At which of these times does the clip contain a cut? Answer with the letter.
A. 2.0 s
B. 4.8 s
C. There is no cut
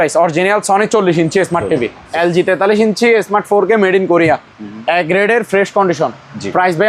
A